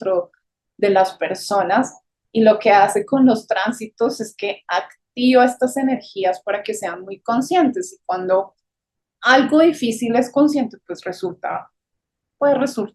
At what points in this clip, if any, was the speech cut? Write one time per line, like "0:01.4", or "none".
none